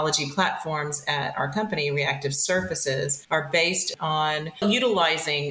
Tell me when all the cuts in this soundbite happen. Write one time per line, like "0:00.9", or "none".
0:03.2
0:04.6